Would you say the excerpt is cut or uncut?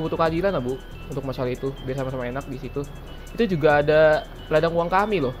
uncut